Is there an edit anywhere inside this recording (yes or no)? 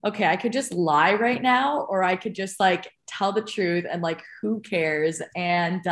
no